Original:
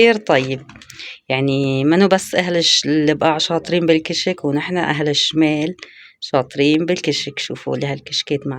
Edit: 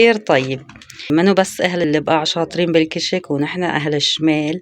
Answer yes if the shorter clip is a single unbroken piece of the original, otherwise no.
no